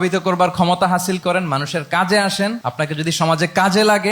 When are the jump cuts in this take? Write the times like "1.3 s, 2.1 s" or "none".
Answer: 2.6 s